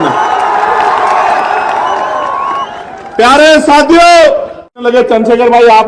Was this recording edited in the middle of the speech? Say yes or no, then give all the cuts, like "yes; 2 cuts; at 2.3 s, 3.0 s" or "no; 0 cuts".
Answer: yes; 1 cut; at 4.7 s